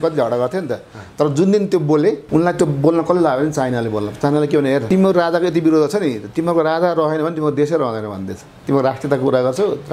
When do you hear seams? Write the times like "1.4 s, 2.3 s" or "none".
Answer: 2.2 s, 4.8 s

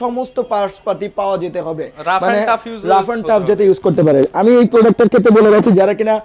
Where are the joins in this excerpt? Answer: none

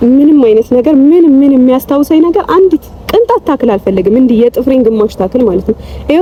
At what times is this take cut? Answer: none

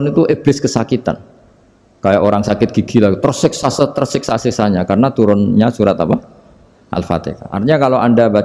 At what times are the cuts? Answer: none

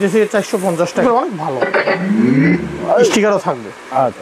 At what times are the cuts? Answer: 1.0 s, 3.1 s

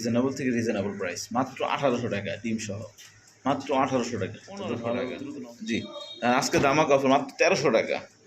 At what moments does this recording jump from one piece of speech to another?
5.2 s

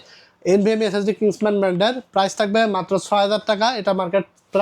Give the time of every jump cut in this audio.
none

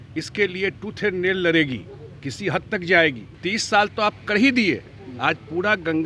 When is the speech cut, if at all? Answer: 3.4 s

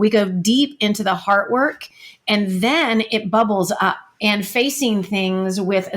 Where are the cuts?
4.1 s

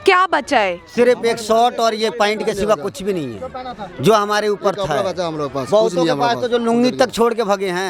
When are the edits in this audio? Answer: none

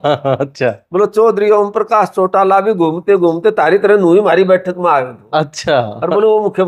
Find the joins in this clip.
none

